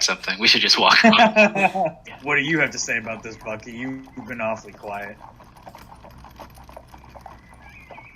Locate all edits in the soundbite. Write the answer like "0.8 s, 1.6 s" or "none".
2.1 s

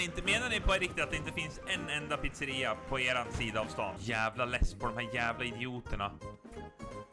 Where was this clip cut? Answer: 4.0 s

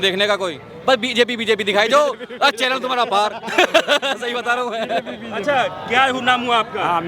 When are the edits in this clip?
none

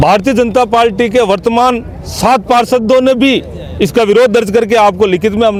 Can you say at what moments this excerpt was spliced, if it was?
none

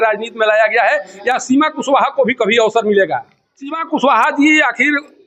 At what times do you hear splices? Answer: 3.8 s

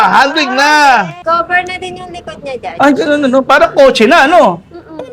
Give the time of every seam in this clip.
1.2 s

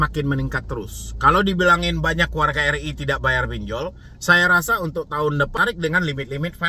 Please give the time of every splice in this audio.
5.5 s

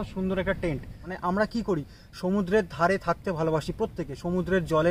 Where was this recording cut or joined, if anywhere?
1.1 s

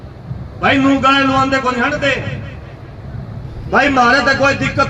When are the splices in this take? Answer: 3.3 s

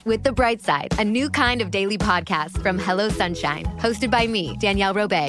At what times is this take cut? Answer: none

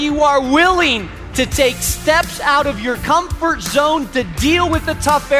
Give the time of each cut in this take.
1.2 s

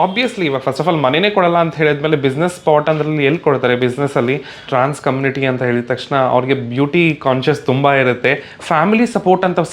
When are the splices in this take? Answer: 4.7 s, 8.6 s

